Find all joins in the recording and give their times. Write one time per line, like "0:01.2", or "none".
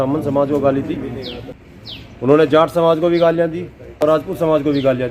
0:01.4
0:04.0